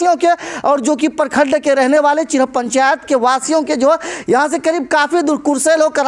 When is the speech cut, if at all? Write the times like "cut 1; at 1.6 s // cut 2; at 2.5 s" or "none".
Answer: none